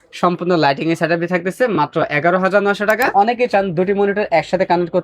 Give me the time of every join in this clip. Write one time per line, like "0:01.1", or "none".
0:03.1